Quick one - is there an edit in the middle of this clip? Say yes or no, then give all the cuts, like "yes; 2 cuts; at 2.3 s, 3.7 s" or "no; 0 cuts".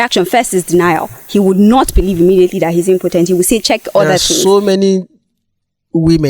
yes; 1 cut; at 4.3 s